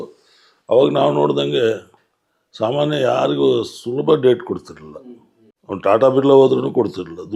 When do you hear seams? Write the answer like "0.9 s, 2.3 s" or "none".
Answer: none